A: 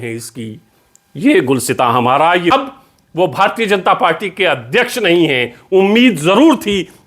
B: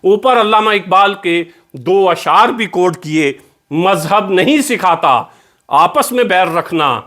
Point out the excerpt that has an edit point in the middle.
A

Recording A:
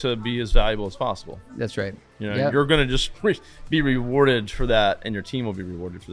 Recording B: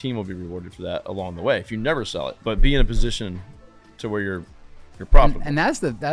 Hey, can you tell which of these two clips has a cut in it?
B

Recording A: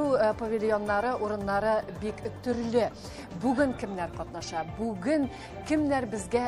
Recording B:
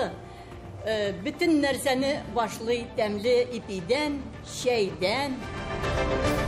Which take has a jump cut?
B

